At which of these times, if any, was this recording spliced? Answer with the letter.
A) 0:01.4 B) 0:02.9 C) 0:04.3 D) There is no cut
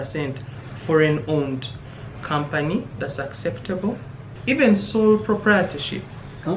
C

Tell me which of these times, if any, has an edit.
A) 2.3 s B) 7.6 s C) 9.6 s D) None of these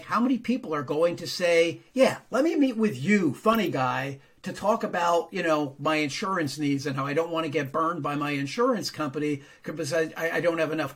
D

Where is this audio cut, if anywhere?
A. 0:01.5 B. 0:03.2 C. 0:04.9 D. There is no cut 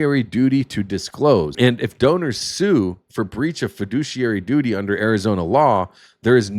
A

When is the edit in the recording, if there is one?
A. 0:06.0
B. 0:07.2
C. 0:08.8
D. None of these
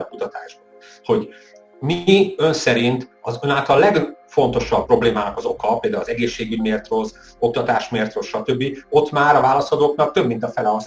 D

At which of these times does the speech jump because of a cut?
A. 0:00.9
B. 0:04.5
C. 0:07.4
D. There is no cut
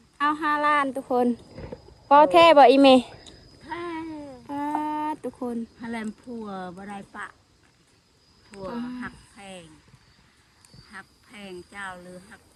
D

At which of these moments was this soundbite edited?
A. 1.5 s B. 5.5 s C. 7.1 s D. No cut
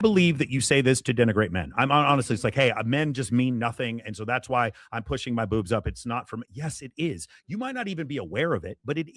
D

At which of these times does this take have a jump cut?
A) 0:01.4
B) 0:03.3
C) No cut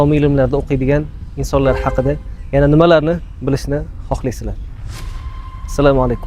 C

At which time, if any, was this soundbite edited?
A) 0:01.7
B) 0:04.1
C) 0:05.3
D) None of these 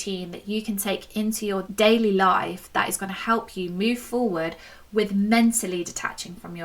A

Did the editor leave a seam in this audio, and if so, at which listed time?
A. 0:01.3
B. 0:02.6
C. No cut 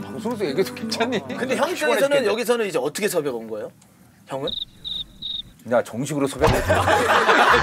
A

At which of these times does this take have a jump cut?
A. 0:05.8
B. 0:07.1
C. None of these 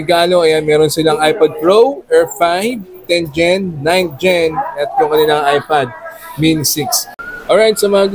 B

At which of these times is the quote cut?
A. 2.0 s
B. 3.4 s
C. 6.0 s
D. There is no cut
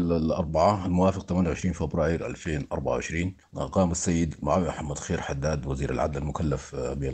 B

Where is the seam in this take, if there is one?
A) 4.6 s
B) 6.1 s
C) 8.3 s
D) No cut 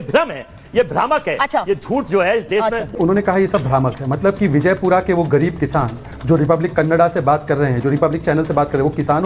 D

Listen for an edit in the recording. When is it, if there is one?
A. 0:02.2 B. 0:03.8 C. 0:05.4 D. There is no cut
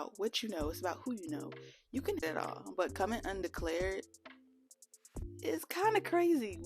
A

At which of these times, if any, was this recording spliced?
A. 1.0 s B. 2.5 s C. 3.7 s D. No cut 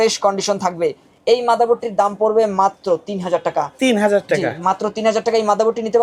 D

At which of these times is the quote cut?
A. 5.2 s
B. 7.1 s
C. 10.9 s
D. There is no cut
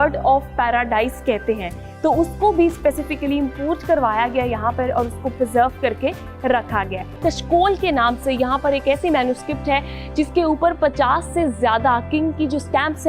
B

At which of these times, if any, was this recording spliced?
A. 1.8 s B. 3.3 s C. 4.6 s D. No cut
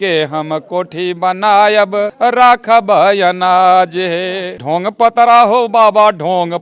C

